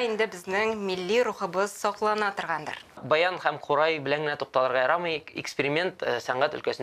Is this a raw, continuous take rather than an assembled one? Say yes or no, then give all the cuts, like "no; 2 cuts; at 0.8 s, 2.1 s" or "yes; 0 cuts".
no; 1 cut; at 3.0 s